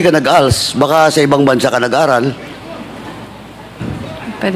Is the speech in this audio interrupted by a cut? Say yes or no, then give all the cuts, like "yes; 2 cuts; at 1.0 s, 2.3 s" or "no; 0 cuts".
no; 0 cuts